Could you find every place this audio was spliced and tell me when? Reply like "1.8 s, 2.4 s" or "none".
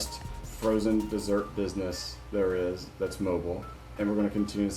none